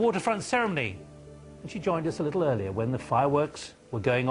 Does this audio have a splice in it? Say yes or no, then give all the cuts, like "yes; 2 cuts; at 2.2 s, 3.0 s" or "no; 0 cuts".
yes; 1 cut; at 1.4 s